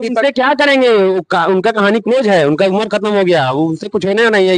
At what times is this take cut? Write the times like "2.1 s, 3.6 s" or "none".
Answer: none